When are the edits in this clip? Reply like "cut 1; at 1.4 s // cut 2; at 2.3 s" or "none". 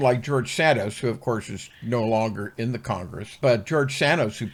none